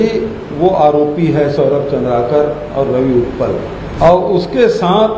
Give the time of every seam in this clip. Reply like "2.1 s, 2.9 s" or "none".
3.8 s